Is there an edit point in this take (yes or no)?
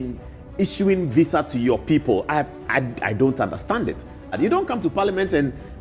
yes